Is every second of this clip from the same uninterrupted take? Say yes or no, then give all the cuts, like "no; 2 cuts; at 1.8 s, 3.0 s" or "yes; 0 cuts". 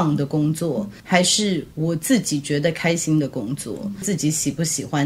no; 2 cuts; at 1.0 s, 4.0 s